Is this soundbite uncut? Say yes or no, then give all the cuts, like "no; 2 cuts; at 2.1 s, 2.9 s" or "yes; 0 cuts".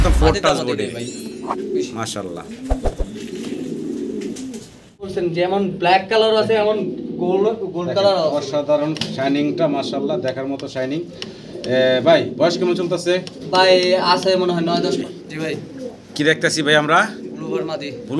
no; 2 cuts; at 5.1 s, 15.0 s